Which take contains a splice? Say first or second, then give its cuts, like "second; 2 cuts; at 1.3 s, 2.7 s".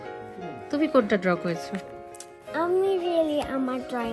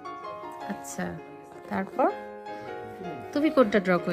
second; 1 cut; at 1.0 s